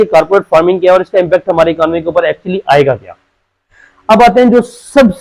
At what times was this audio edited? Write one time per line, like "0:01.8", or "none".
none